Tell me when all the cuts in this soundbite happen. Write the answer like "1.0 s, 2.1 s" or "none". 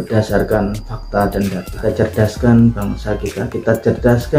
1.7 s